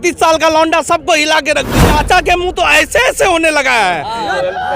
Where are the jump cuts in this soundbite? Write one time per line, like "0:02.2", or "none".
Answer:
0:01.8